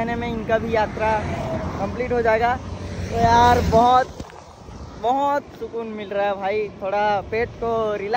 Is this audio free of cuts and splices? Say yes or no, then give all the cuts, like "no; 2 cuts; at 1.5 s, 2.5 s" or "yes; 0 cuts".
yes; 0 cuts